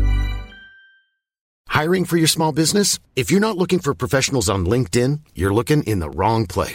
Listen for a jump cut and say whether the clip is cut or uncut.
cut